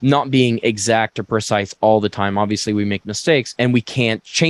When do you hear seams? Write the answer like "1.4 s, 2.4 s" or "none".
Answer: none